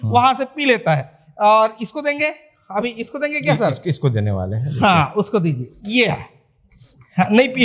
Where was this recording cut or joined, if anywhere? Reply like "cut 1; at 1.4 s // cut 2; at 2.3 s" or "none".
none

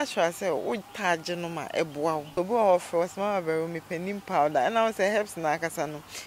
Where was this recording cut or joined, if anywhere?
cut 1; at 2.3 s

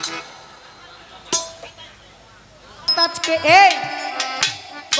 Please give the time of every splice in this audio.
cut 1; at 2.9 s

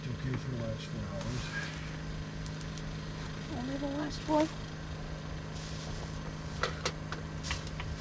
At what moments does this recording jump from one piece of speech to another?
none

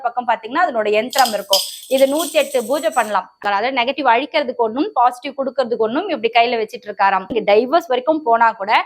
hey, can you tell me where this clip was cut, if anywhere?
cut 1; at 3.3 s // cut 2; at 7.3 s

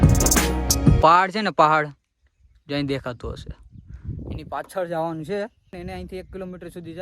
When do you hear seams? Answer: cut 1; at 1.0 s // cut 2; at 5.8 s

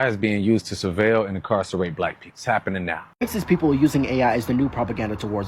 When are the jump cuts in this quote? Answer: cut 1; at 3.1 s

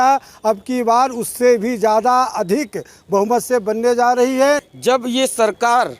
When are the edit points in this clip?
cut 1; at 4.7 s

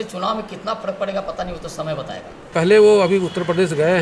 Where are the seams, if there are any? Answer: cut 1; at 2.5 s

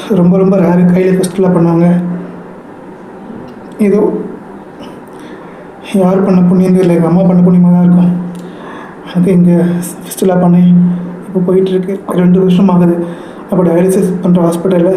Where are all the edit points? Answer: cut 1; at 11.7 s

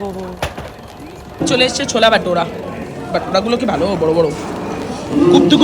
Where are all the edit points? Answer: cut 1; at 1.4 s

